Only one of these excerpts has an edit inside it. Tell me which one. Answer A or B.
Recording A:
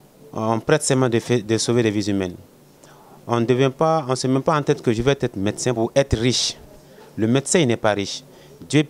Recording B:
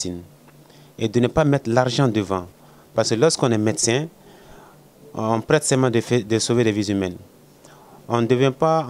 A